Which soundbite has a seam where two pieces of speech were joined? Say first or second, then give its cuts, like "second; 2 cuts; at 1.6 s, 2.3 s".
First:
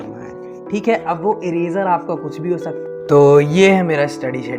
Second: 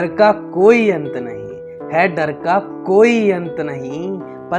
first; 1 cut; at 2.8 s